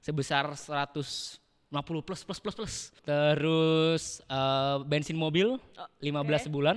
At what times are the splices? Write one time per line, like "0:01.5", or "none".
0:02.8